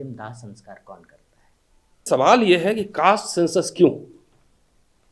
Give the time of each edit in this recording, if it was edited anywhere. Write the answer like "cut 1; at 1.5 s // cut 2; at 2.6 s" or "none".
cut 1; at 2.0 s